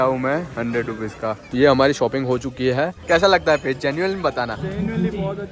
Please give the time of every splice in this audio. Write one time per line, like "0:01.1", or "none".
0:01.5
0:03.0